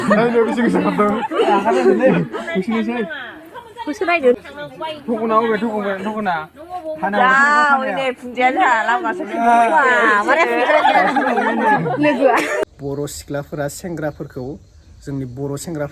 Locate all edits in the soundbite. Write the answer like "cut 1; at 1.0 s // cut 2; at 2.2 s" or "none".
cut 1; at 4.4 s // cut 2; at 12.6 s